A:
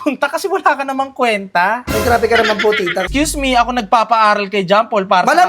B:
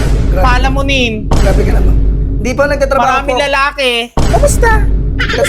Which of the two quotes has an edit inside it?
A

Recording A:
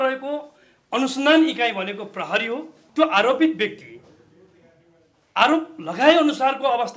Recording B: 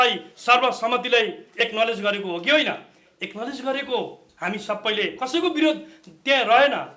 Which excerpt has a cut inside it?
A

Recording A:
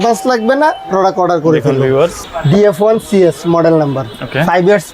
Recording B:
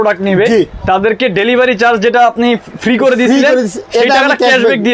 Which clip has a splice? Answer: A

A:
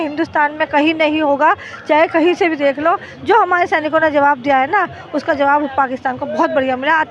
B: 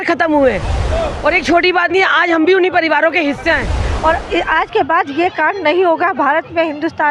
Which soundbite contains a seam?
B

